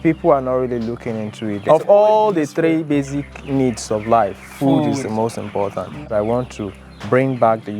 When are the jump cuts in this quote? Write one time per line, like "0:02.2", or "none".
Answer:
0:01.6
0:06.0